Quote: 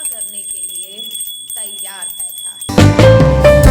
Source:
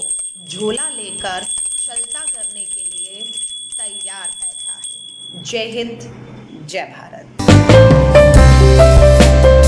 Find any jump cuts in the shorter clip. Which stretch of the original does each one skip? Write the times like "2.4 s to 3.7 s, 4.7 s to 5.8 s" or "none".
4.8 s to 7.3 s